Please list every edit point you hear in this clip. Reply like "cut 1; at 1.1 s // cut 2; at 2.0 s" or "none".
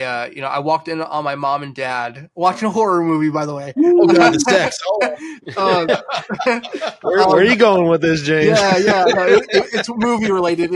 none